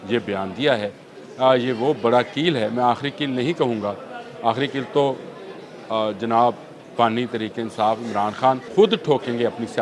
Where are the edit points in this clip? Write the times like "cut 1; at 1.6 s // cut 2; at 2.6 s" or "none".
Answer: cut 1; at 8.6 s